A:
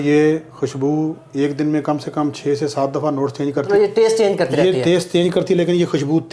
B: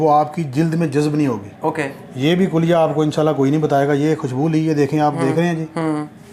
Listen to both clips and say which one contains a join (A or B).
A